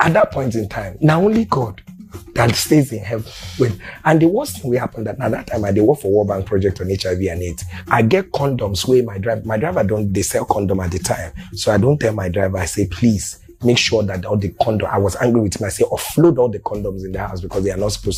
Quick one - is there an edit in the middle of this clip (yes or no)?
no